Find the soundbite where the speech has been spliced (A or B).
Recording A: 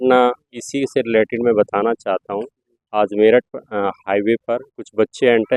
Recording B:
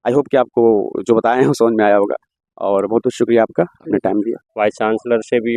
B